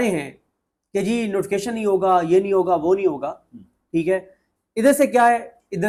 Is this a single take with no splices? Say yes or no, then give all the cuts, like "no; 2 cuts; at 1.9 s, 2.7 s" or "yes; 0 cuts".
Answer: yes; 0 cuts